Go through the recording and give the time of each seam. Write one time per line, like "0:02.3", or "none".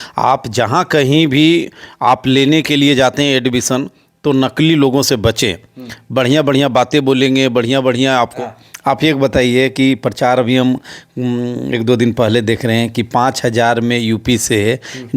0:08.3

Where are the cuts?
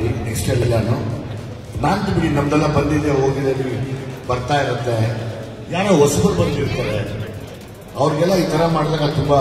none

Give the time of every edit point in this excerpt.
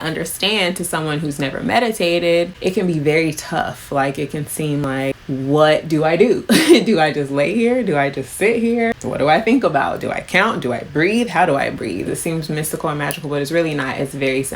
0:02.5
0:04.8
0:09.0
0:12.1

